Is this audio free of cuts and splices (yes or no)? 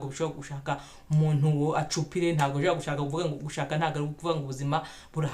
yes